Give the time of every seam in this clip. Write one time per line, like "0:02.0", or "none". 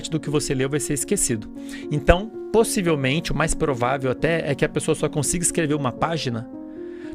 none